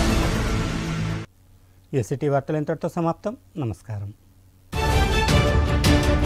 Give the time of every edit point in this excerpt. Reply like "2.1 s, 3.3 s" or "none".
none